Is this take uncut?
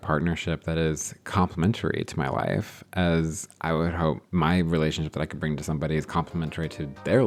yes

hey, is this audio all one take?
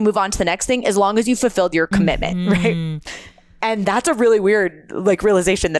yes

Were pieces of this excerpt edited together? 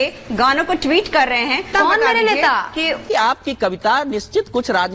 yes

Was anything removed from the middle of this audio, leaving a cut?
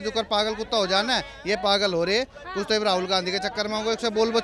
no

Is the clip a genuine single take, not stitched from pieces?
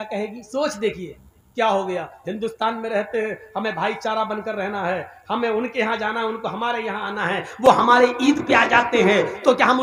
yes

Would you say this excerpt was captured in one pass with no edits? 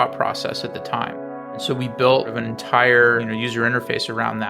no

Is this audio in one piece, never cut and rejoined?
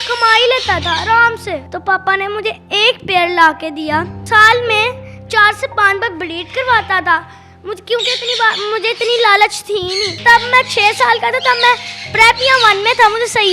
no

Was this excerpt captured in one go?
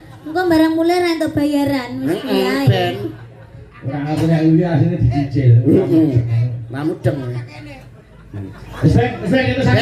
yes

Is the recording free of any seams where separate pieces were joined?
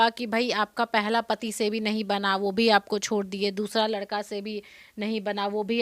yes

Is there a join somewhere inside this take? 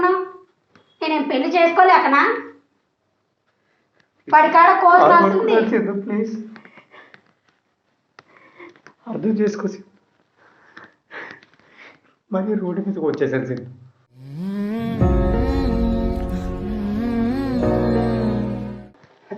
no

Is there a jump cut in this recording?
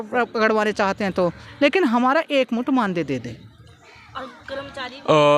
no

